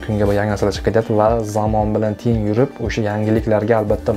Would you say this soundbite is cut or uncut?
uncut